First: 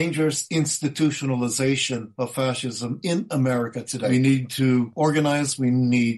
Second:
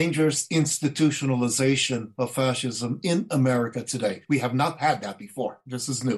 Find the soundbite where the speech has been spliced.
first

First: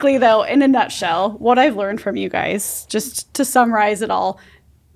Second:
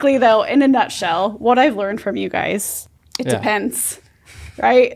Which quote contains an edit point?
second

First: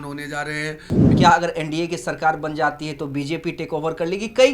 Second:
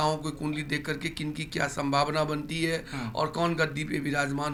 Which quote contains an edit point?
first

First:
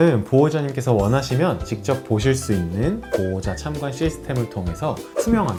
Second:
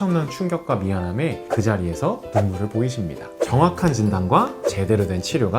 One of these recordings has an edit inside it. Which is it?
second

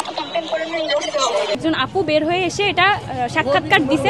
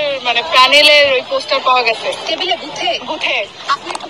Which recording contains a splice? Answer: first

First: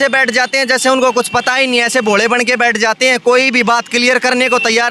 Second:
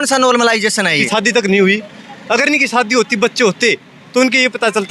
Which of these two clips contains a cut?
second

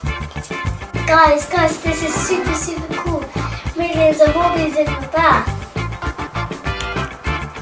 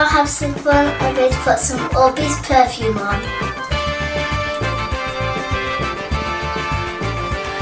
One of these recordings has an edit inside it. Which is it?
second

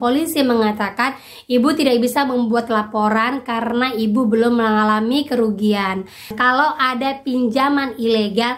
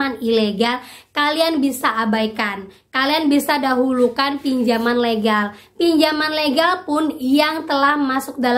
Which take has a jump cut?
first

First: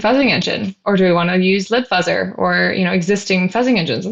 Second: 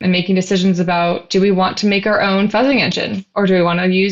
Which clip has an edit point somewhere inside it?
second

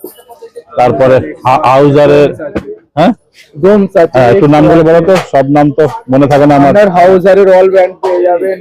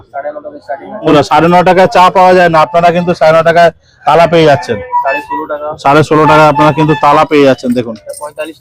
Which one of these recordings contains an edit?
second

